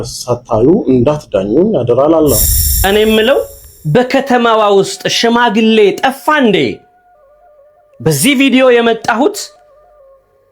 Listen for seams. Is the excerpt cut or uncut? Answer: cut